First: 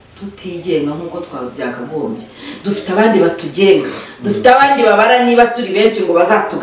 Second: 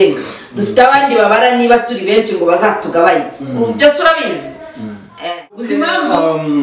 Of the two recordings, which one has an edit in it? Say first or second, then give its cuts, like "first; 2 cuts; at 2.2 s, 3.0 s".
second; 1 cut; at 5.7 s